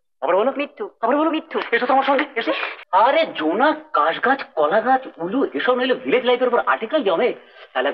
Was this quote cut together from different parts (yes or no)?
yes